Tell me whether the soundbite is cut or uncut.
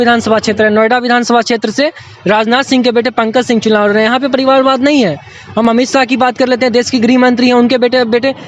cut